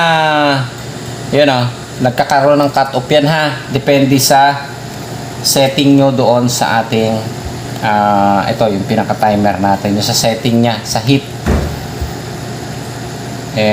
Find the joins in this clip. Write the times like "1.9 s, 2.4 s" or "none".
none